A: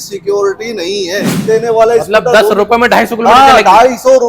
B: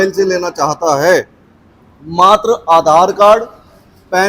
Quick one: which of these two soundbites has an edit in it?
A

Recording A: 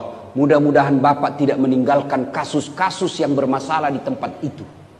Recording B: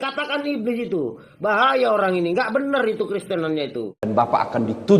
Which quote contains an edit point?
B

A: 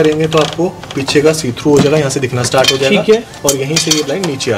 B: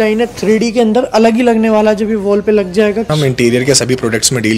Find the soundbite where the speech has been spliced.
B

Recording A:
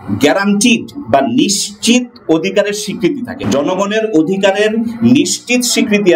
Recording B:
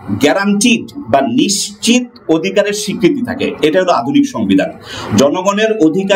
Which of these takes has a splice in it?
A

